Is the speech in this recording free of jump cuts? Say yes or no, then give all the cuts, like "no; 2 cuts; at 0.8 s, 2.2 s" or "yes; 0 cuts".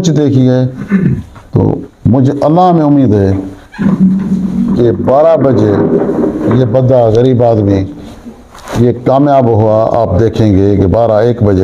yes; 0 cuts